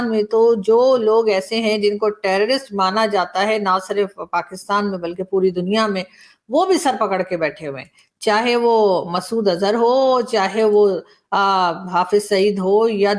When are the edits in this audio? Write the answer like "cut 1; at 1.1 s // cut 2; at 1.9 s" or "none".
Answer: none